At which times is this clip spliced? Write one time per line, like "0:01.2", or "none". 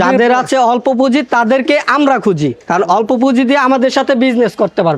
0:02.6

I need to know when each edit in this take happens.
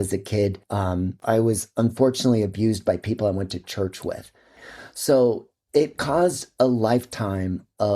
0:01.1
0:04.4

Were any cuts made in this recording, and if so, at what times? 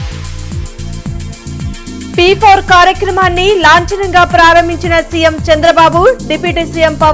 0:02.1

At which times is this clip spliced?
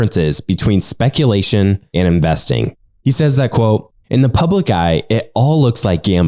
0:01.8
0:02.8

